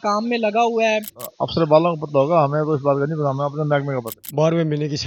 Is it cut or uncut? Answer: cut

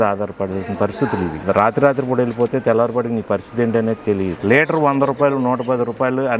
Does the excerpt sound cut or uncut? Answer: cut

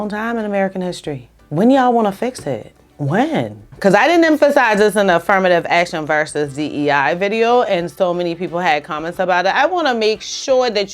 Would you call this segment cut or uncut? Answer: cut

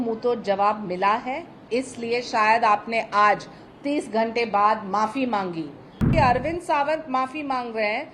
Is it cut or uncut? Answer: cut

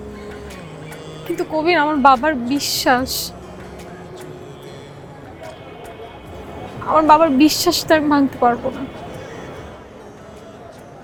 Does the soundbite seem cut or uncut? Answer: uncut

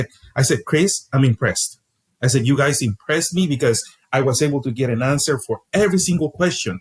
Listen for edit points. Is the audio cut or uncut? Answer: uncut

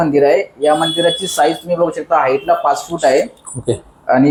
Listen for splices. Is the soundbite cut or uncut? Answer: uncut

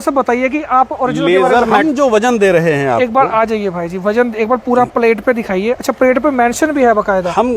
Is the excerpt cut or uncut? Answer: cut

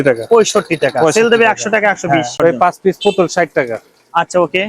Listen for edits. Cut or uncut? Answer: cut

